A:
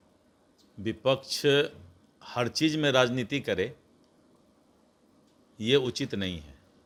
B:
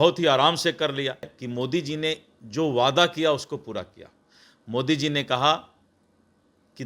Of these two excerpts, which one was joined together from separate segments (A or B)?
B